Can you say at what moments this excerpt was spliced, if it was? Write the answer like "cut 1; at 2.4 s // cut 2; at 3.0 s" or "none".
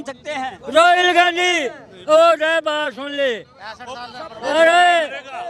none